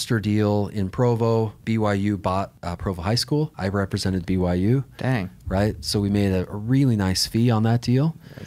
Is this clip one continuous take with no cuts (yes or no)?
no